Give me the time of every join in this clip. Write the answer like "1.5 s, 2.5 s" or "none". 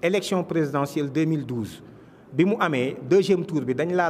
none